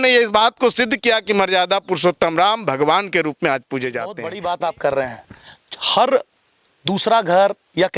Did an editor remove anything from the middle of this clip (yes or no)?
yes